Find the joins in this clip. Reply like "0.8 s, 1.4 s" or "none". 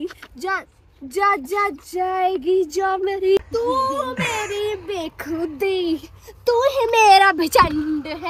none